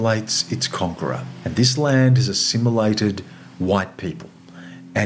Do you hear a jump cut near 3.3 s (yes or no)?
no